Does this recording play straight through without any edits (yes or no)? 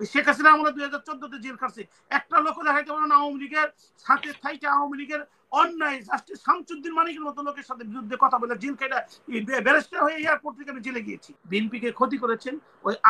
no